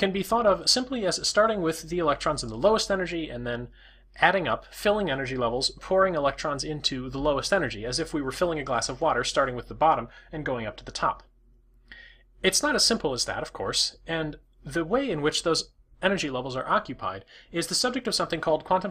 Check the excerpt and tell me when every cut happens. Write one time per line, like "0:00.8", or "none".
0:14.4